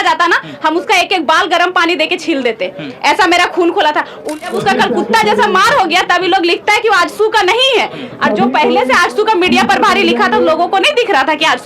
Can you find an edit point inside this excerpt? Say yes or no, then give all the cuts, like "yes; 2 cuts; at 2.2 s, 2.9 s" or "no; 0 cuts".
yes; 1 cut; at 4.3 s